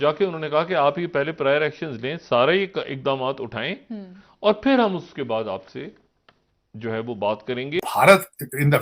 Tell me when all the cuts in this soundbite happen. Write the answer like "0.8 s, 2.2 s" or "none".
7.8 s